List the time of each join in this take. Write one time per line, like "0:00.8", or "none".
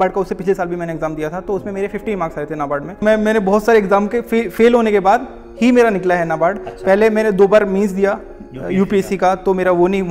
0:03.0

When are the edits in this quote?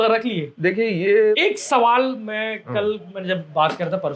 0:01.4

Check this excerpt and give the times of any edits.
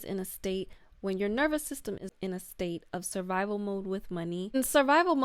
0:02.1

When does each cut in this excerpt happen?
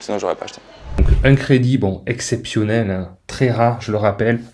0:01.0

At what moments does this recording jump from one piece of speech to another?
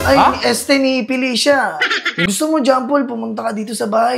0:02.3

